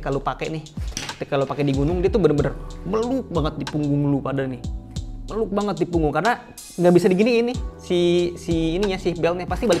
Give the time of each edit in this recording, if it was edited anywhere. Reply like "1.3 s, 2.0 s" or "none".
none